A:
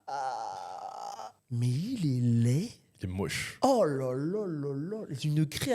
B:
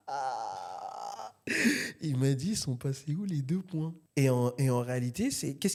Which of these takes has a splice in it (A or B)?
A